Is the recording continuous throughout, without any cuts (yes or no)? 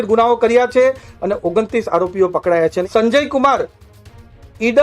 no